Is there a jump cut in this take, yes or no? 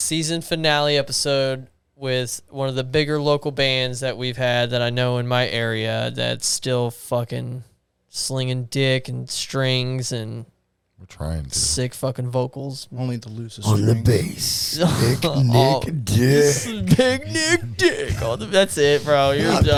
no